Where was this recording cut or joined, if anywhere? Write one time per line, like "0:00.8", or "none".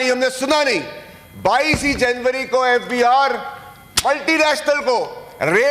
none